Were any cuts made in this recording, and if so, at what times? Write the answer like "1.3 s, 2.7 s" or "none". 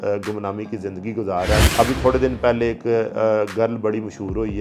1.7 s

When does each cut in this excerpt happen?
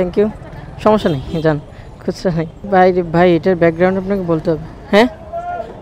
none

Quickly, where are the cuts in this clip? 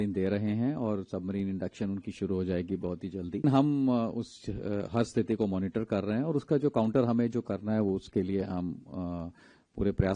3.4 s

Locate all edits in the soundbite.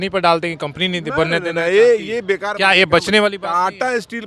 none

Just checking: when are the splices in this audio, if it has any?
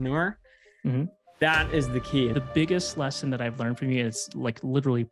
2.3 s

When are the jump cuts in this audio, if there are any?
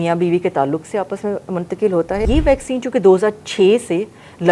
2.3 s

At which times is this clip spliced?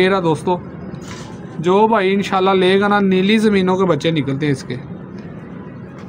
none

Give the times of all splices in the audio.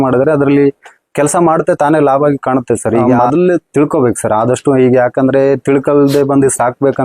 3.1 s

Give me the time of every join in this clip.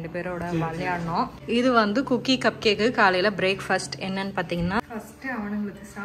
1.4 s, 4.8 s

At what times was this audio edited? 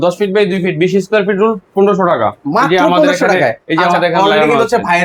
none

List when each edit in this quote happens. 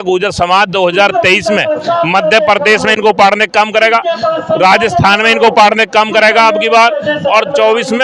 none

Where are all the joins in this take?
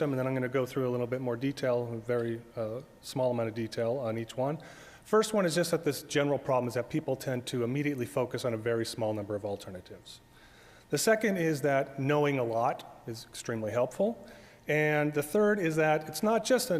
14.0 s

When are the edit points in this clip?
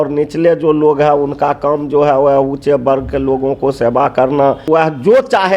4.7 s

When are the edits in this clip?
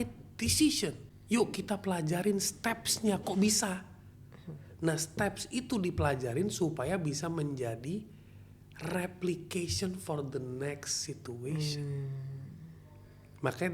1.1 s

